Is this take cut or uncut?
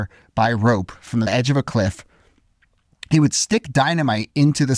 cut